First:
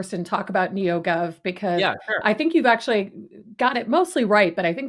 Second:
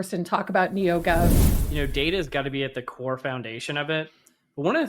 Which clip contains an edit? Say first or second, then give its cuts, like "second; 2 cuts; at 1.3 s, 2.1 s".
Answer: second; 1 cut; at 1.4 s